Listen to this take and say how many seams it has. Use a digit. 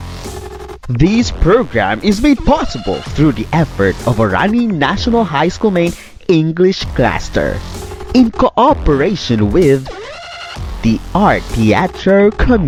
0